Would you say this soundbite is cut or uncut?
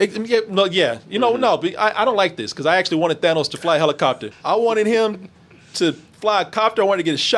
cut